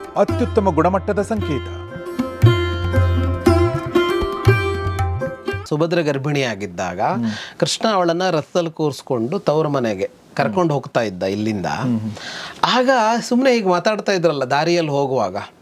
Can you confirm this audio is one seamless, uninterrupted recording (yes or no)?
no